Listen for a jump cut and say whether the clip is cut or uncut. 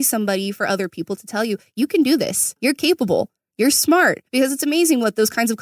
cut